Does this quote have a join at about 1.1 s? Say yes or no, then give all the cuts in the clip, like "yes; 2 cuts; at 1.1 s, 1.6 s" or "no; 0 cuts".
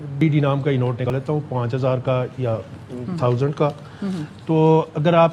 yes; 1 cut; at 1.1 s